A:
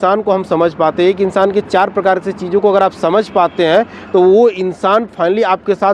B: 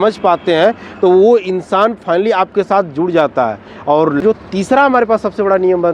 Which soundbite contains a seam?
B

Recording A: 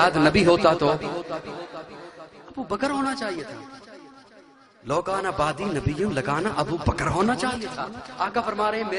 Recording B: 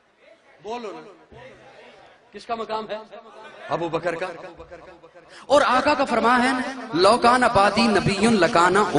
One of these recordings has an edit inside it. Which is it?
A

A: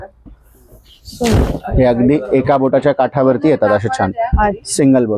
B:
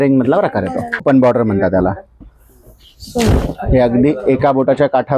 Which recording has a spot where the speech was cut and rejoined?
B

